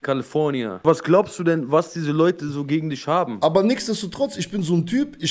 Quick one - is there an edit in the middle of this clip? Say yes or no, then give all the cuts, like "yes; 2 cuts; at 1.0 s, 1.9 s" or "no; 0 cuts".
yes; 2 cuts; at 0.8 s, 3.3 s